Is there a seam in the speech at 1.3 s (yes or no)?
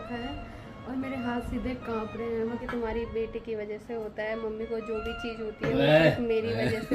no